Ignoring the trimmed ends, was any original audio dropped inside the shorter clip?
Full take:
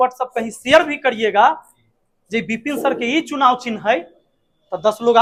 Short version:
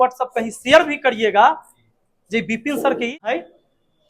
yes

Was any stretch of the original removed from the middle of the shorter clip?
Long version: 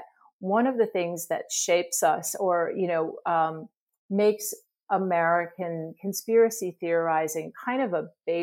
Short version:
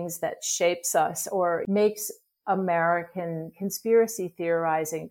yes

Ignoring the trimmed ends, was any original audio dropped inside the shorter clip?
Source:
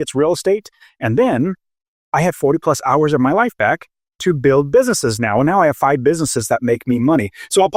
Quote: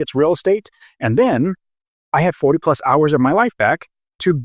no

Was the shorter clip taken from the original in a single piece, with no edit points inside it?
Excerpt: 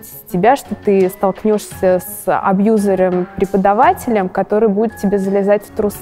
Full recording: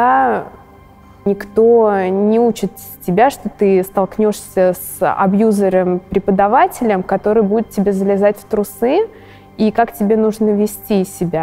yes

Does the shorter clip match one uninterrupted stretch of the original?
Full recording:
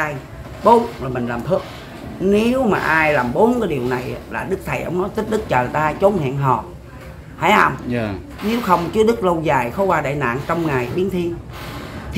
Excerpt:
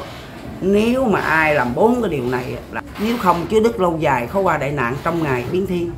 no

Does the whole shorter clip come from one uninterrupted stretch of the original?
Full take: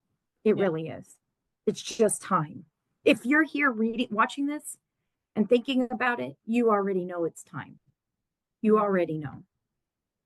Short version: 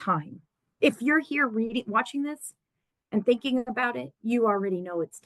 yes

